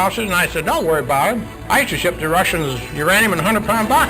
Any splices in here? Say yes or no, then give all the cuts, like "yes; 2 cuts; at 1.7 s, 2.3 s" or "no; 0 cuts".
yes; 1 cut; at 1.5 s